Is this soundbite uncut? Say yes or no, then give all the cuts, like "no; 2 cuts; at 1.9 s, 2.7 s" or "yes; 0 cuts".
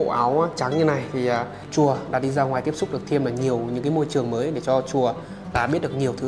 no; 1 cut; at 1.6 s